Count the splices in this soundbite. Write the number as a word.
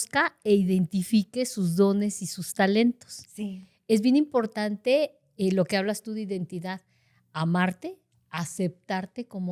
zero